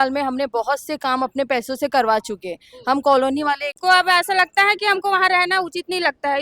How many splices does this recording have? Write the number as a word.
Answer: one